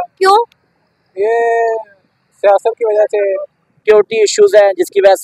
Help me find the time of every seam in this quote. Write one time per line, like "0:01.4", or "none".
0:03.8